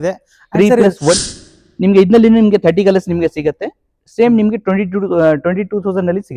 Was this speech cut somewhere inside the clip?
yes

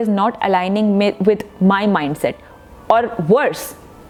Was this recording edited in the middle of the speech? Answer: no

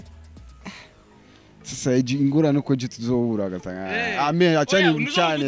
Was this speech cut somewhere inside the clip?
no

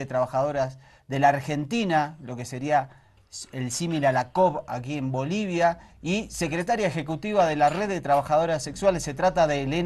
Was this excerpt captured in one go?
yes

